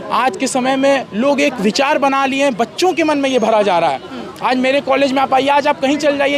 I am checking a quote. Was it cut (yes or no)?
no